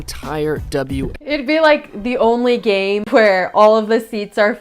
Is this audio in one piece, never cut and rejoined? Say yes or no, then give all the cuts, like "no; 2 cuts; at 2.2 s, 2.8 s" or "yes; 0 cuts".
no; 2 cuts; at 1.2 s, 3.1 s